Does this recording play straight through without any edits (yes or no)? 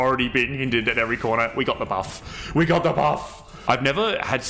no